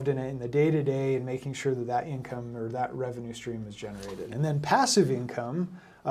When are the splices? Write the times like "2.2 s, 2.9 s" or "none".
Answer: 4.3 s